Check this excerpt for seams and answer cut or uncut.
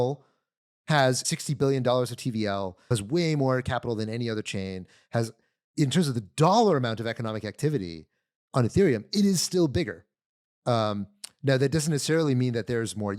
cut